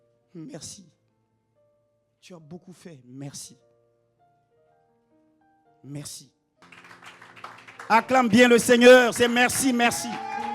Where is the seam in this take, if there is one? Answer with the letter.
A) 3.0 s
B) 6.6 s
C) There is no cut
B